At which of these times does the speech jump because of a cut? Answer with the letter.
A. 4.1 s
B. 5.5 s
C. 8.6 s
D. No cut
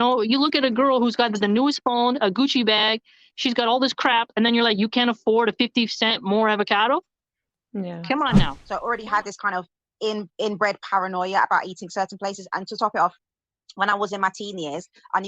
C